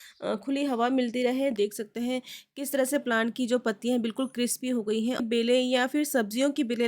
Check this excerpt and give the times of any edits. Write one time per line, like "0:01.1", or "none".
0:01.5
0:05.2